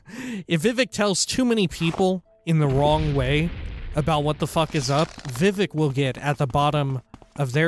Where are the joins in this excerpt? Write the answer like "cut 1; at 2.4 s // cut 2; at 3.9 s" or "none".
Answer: cut 1; at 5.2 s